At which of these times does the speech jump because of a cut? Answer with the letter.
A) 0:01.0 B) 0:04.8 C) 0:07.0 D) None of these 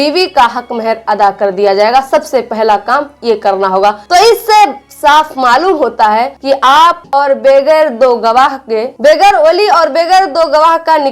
C